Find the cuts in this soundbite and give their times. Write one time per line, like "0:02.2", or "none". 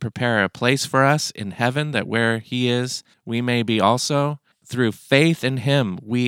0:04.6